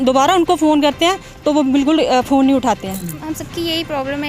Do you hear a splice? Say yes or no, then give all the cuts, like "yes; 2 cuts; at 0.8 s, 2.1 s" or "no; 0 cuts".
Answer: yes; 1 cut; at 3.3 s